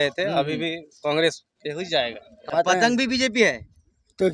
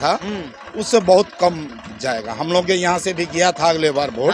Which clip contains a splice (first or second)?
first